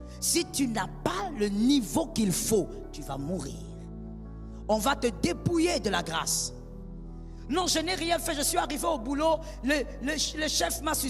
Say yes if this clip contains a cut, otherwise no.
no